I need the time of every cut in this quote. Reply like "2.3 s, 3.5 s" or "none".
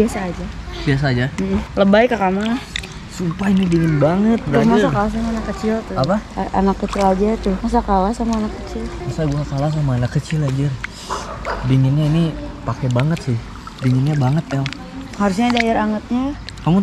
9.0 s